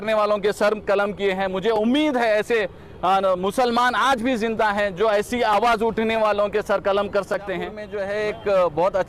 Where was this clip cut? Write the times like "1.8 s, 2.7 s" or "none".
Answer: 7.9 s